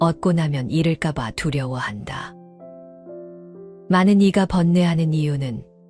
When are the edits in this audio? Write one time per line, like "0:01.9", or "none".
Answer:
none